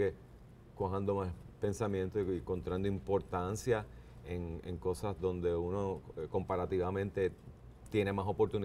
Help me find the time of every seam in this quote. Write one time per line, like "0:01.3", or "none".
none